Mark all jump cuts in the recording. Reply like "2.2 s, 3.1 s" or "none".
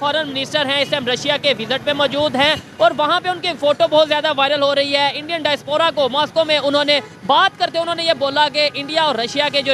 none